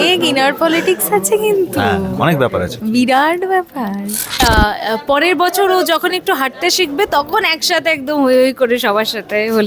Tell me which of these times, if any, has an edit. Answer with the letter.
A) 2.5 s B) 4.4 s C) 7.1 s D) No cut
B